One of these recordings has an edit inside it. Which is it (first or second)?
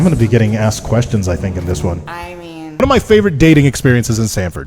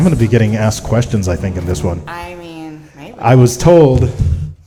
first